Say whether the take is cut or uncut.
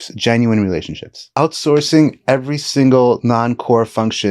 cut